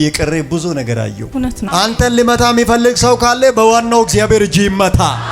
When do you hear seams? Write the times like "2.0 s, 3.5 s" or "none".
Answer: 1.6 s